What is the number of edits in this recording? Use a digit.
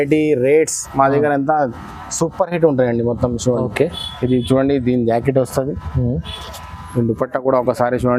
0